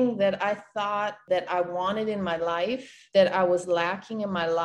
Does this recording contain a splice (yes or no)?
yes